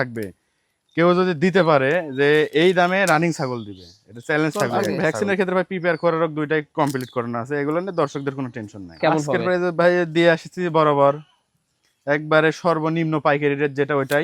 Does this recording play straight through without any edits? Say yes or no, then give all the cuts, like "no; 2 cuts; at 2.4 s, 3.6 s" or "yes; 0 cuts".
no; 2 cuts; at 4.6 s, 8.9 s